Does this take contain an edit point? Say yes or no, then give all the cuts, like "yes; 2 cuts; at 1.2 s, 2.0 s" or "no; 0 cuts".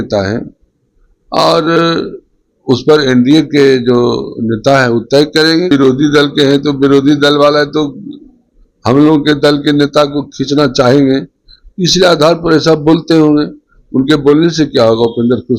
yes; 1 cut; at 5.7 s